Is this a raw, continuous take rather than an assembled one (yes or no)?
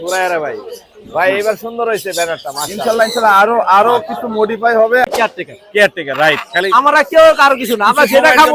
no